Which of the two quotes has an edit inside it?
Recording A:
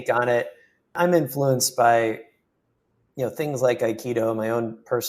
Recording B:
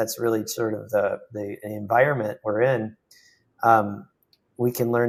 A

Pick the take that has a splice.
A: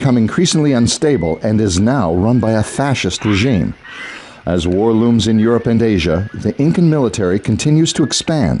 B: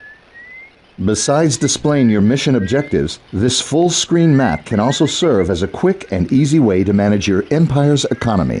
A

